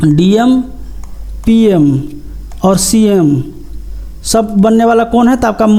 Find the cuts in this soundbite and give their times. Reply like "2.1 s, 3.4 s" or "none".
none